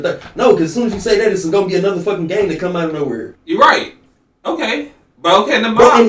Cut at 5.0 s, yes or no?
no